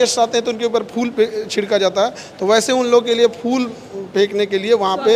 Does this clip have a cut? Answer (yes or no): no